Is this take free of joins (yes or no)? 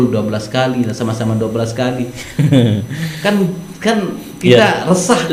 yes